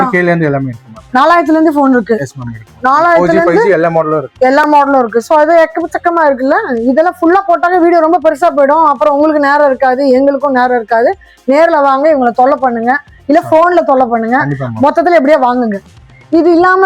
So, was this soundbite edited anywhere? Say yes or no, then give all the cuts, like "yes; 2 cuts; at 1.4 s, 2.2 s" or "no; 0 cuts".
no; 0 cuts